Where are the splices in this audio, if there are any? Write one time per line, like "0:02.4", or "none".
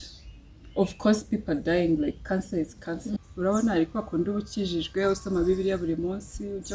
0:03.2